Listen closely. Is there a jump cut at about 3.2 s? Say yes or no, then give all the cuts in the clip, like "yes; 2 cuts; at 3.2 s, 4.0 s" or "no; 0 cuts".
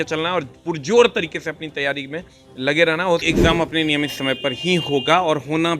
yes; 1 cut; at 3.2 s